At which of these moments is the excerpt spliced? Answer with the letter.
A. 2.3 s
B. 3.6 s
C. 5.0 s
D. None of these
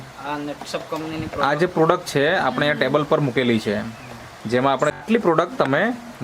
C